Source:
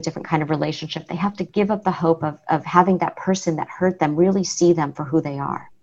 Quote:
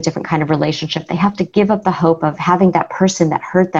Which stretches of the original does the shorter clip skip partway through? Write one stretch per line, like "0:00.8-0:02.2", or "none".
0:02.4-0:02.7